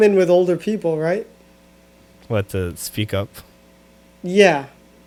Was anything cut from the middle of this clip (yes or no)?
no